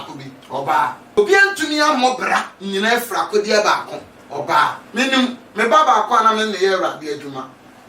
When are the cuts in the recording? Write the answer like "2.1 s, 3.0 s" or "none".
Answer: 1.2 s, 4.8 s